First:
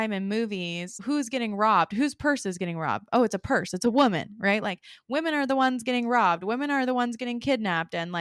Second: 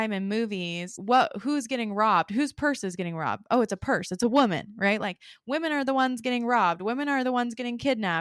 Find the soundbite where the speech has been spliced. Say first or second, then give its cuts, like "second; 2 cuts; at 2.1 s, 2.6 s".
first; 1 cut; at 1.0 s